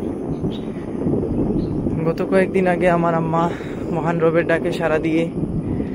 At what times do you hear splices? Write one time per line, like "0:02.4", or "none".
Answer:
none